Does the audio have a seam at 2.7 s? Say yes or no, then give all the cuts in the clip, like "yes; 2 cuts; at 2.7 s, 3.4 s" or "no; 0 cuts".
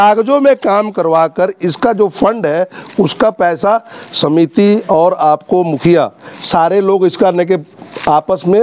no; 0 cuts